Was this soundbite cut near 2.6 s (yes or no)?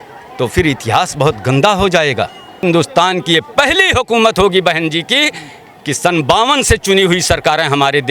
yes